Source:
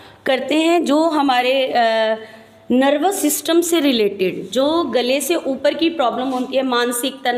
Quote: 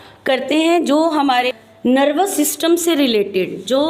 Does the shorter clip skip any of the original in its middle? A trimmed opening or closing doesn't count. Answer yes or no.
yes